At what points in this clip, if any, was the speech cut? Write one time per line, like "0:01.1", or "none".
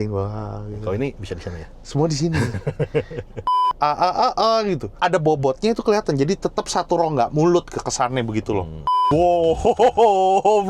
0:03.6
0:04.9
0:09.0